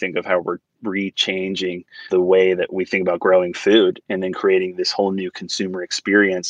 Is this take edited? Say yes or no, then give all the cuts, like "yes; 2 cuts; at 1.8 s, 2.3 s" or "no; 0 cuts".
yes; 1 cut; at 1.9 s